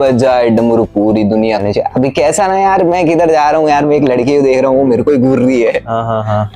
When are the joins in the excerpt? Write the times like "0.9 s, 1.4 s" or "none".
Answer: 1.6 s

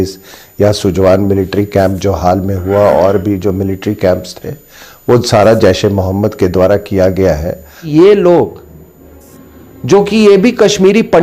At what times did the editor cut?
7.8 s

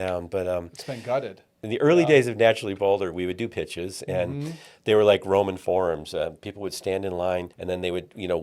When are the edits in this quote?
1.6 s, 7.5 s

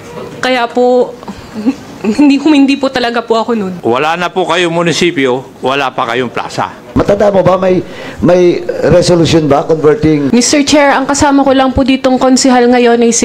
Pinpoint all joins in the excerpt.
3.7 s, 6.9 s, 10.3 s

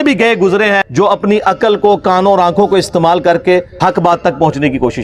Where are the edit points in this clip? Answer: 0.9 s, 3.7 s

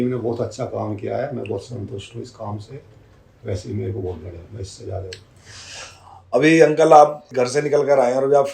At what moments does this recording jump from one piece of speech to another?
7.3 s

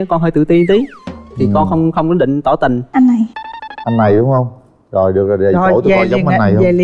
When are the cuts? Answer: 2.8 s

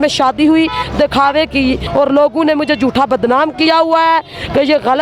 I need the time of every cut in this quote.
1.8 s

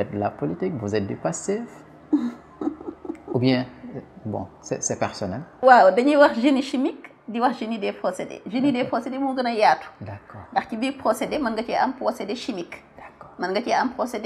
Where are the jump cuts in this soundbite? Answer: 5.5 s

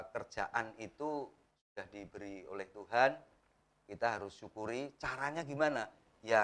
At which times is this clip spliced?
none

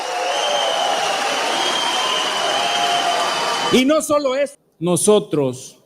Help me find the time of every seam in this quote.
4.6 s

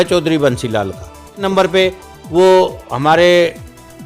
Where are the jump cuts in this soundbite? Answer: 1.4 s

